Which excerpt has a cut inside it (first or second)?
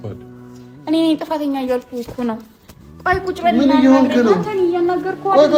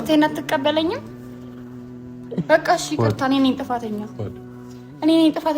second